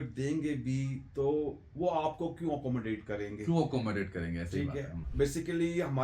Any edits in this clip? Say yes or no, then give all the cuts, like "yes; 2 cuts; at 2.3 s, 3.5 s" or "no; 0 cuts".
yes; 1 cut; at 5.0 s